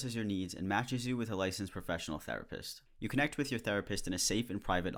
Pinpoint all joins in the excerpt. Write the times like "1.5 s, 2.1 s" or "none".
none